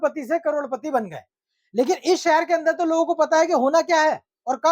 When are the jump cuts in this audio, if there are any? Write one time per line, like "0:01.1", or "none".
none